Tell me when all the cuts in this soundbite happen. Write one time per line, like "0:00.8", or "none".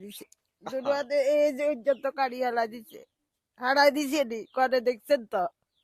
none